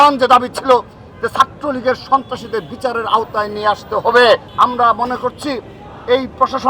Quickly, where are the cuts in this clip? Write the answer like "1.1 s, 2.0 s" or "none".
4.5 s